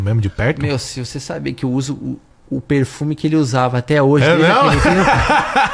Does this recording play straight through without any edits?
yes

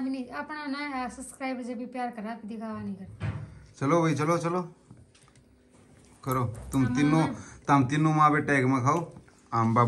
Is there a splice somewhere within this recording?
no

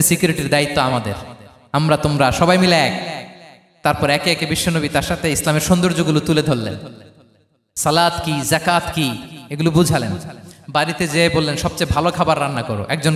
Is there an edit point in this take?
no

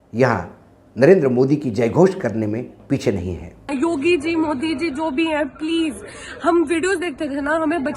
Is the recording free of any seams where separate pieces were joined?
no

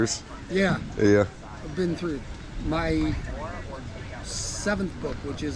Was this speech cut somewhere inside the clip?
no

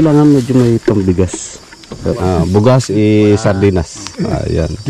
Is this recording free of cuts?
no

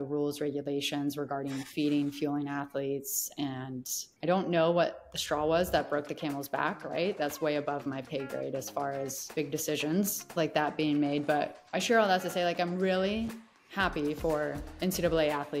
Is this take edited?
no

